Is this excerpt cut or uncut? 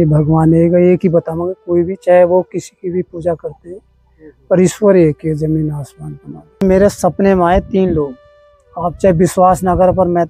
cut